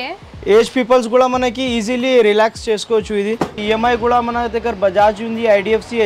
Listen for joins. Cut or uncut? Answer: cut